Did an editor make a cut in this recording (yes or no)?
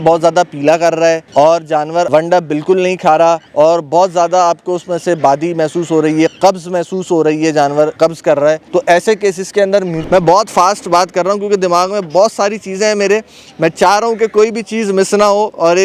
yes